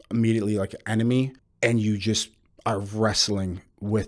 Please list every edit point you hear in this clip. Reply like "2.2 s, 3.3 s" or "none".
1.4 s